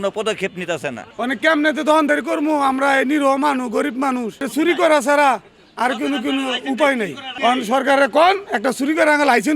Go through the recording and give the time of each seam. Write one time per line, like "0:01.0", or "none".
0:01.0